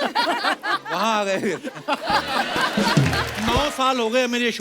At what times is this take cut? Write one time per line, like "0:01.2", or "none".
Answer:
0:03.3